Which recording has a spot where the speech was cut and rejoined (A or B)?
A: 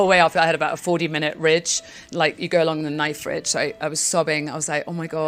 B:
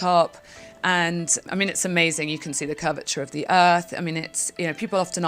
B